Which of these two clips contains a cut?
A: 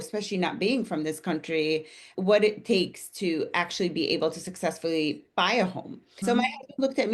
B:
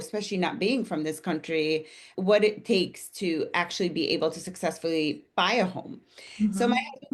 A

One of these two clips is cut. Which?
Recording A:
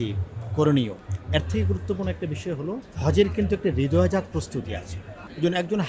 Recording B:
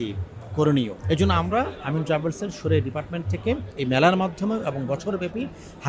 B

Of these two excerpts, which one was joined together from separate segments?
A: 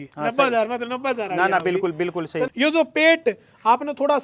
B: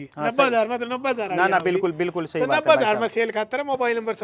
A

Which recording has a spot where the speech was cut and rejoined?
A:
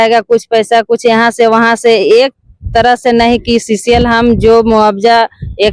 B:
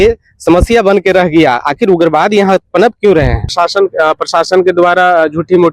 B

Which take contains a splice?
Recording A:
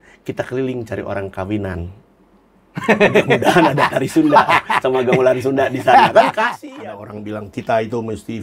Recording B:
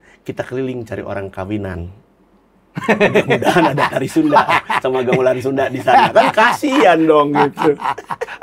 A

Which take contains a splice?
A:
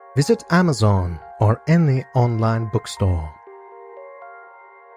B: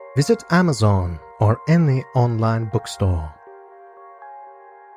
A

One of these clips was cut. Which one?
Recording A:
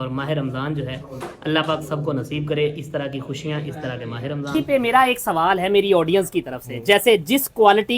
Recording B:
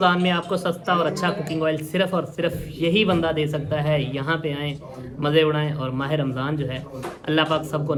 A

